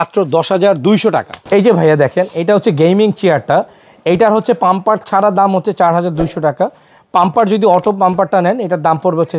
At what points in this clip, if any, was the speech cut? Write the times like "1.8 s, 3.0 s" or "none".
1.3 s